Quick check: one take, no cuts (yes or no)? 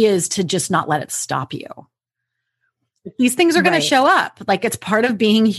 yes